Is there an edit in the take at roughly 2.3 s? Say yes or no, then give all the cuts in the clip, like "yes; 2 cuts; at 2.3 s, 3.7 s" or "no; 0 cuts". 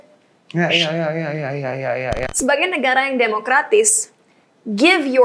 yes; 1 cut; at 2.3 s